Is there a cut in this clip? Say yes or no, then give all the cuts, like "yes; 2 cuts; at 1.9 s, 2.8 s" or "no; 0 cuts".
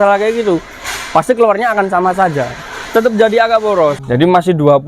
yes; 2 cuts; at 2.8 s, 4.0 s